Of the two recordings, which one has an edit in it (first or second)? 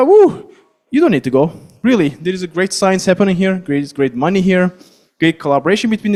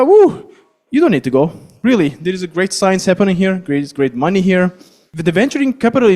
second